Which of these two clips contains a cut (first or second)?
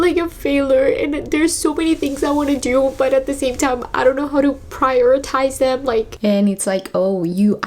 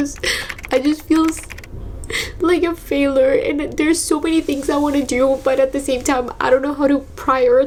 first